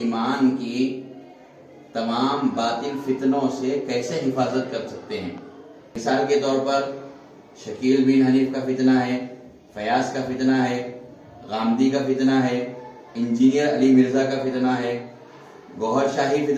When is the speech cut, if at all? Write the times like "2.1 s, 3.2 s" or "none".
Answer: 6.0 s